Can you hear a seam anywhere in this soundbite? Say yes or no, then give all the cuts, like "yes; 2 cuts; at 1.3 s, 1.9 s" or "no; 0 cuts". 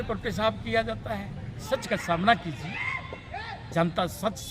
yes; 1 cut; at 1.5 s